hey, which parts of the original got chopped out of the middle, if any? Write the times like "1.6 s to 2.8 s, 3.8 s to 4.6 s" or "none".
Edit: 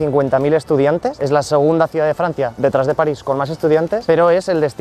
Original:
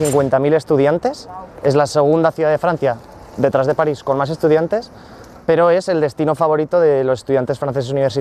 1.1 s to 1.6 s, 3.0 s to 3.3 s, 4.8 s to 5.4 s